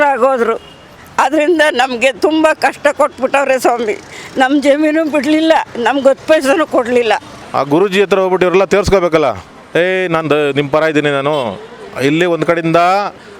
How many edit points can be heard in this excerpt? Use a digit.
1